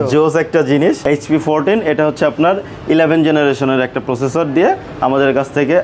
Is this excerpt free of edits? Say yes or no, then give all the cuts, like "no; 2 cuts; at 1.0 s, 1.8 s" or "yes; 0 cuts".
no; 1 cut; at 1.0 s